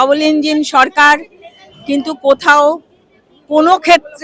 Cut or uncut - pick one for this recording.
uncut